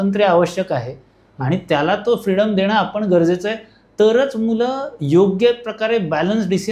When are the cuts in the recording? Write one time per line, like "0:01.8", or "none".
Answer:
none